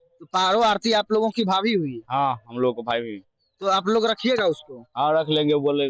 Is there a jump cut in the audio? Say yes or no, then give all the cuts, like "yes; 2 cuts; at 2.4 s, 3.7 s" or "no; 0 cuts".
no; 0 cuts